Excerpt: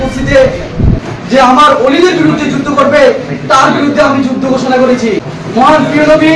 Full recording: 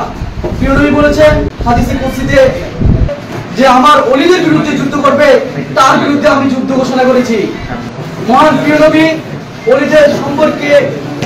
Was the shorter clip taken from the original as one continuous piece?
no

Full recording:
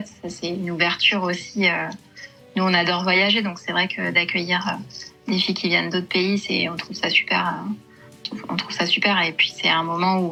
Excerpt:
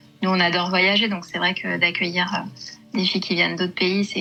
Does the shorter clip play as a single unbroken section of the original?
yes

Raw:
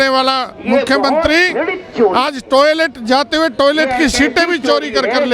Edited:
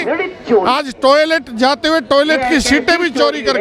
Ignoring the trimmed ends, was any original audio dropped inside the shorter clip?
no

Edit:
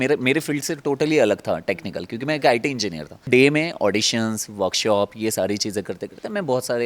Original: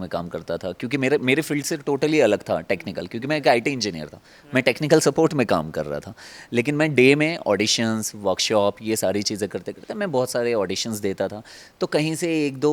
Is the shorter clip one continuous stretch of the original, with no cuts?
no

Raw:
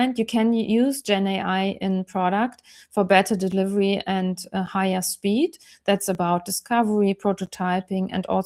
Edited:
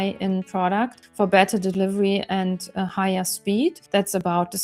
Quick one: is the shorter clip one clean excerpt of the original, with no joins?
no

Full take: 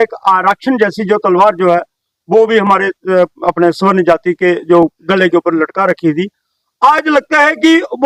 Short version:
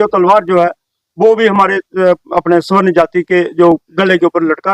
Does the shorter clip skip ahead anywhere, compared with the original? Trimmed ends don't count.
no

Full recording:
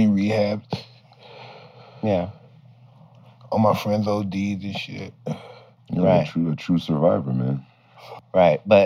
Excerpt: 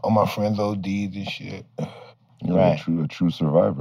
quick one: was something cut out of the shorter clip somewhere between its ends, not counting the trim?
no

